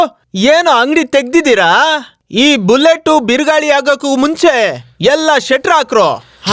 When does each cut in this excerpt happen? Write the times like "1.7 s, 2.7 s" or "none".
none